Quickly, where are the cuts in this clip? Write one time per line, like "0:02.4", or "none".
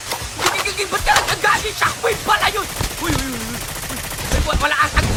none